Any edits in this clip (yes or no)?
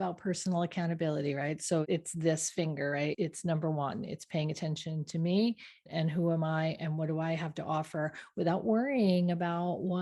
yes